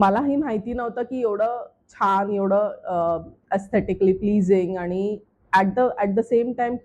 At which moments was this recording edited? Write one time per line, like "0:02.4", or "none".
none